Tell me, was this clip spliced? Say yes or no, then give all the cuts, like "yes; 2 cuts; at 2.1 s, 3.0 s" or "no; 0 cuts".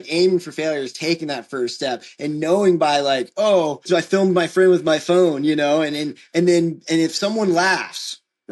yes; 1 cut; at 3.8 s